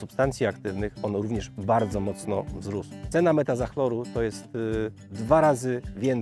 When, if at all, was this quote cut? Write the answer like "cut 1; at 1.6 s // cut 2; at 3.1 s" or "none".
cut 1; at 2.9 s